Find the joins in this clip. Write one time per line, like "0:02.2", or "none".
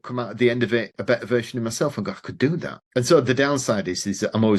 0:00.9
0:02.8